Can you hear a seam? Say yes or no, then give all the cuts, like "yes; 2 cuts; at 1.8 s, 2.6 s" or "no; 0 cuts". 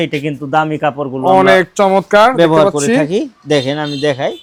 no; 0 cuts